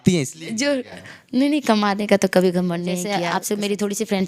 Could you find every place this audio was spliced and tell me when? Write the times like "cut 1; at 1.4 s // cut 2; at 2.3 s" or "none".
cut 1; at 3.2 s